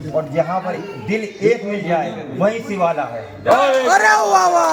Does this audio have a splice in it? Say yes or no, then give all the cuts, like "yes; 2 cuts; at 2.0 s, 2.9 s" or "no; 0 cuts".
no; 0 cuts